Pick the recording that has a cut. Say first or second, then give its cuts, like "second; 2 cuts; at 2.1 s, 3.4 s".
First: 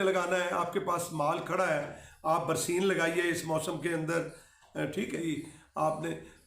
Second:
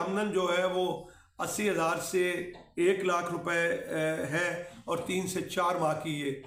first; 1 cut; at 5.5 s